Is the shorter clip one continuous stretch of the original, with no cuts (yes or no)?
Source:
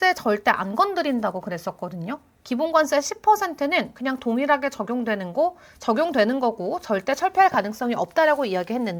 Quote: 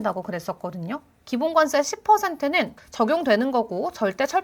no